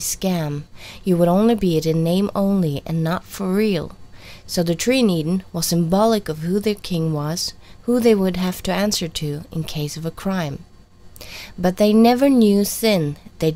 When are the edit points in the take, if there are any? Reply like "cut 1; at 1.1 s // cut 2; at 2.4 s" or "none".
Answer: cut 1; at 6.4 s